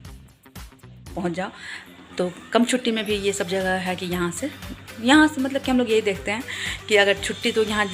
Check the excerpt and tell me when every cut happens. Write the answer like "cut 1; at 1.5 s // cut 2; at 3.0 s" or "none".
cut 1; at 1.1 s